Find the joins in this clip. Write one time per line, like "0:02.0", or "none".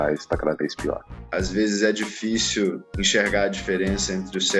0:01.1
0:02.9